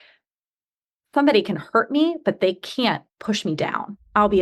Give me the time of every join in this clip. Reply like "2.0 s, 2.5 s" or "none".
3.1 s